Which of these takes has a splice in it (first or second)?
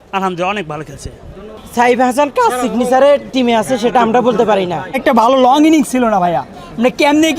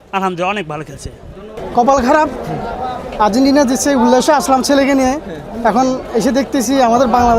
first